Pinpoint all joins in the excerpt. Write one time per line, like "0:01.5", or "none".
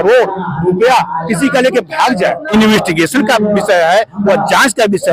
0:02.5